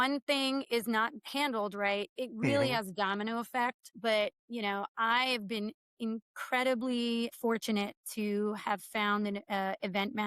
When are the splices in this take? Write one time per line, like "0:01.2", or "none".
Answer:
0:07.3